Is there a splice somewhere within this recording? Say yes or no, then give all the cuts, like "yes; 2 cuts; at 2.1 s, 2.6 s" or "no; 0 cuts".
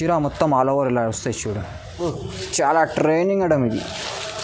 yes; 1 cut; at 2.1 s